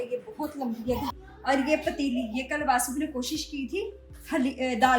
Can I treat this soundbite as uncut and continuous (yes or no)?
no